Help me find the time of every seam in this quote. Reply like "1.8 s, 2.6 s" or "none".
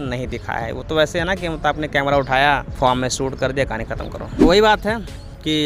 4.3 s

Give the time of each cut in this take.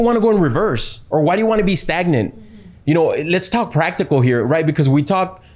none

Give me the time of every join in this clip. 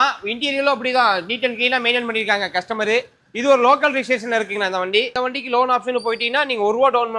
5.1 s

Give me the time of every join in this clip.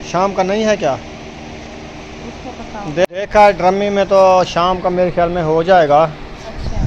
3.1 s

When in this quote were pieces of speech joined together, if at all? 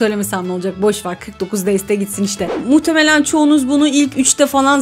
2.5 s

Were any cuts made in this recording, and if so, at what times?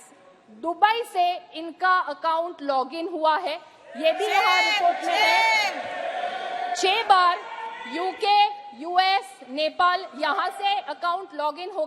none

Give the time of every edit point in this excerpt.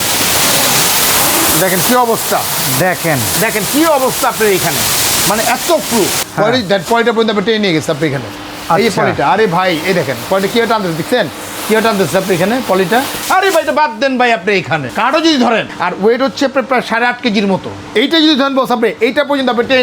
6.2 s, 13.2 s, 14.9 s, 15.7 s, 17.8 s

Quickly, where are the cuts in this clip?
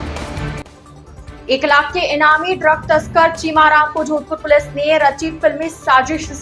none

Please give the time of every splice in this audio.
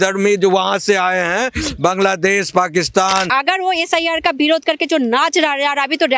3.3 s

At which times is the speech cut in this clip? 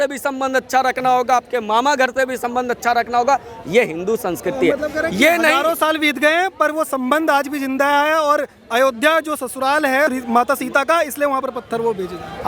none

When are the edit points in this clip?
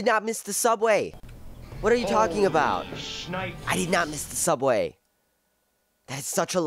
none

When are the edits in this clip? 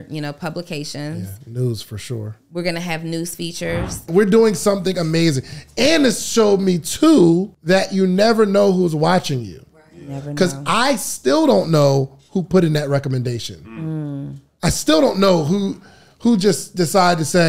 4.1 s, 7.5 s

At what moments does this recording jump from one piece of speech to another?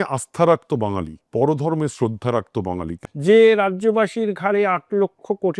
1.1 s, 3.0 s

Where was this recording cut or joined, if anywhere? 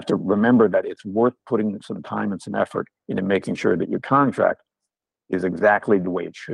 none

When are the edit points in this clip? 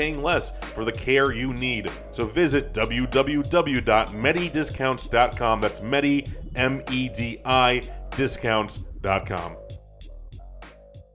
9.5 s

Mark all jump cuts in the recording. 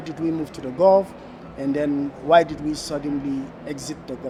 none

